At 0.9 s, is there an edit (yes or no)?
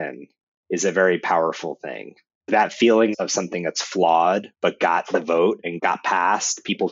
no